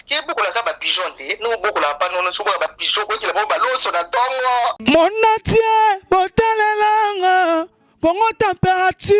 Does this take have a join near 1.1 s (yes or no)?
no